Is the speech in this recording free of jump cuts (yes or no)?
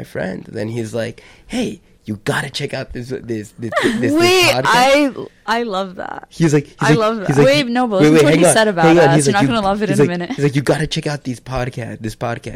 yes